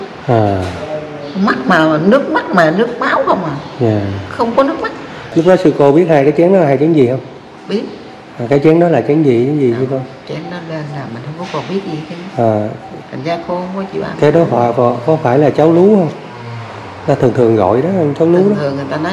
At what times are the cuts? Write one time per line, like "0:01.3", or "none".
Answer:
0:05.3